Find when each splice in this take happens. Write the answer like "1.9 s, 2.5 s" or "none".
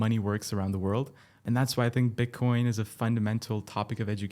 1.4 s